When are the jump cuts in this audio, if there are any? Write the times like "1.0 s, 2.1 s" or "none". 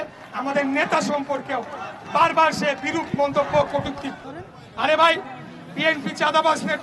4.2 s

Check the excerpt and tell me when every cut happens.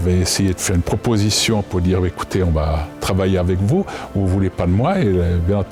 none

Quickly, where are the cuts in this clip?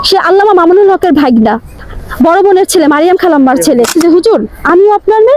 1.8 s, 3.9 s

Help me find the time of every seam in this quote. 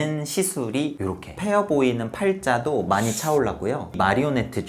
1.0 s

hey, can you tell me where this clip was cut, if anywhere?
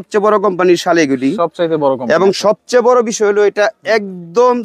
none

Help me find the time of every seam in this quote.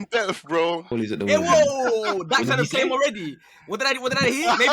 0.9 s

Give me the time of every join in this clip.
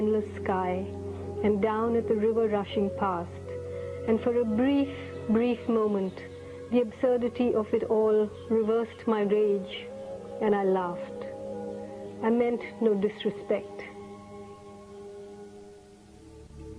5.6 s

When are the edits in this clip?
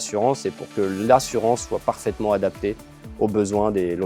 none

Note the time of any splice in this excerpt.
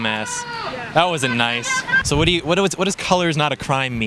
2.0 s

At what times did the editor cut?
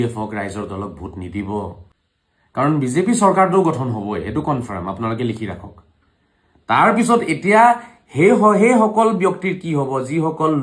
1.8 s

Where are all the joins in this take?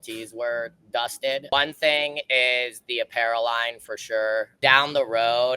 1.5 s, 4.5 s

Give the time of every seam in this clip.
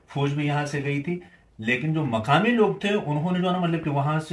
none

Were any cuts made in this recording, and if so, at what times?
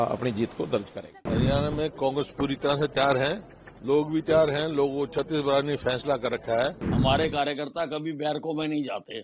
1.0 s, 6.9 s

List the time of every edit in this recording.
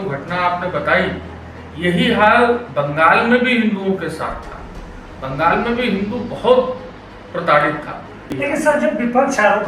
8.3 s

